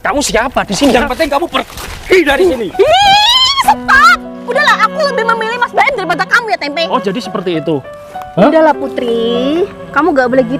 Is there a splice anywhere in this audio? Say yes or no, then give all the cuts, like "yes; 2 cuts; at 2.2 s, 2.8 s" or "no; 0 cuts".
no; 0 cuts